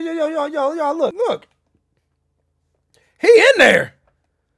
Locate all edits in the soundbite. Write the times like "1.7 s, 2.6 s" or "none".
1.1 s